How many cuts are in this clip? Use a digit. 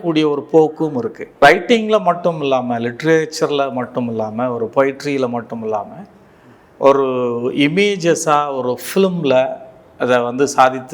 1